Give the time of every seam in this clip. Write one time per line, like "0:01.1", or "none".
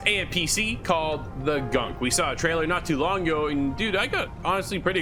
none